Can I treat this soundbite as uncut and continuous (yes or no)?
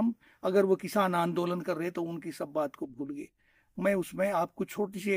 yes